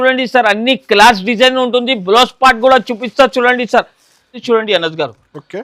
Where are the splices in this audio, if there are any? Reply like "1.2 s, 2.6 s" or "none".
4.4 s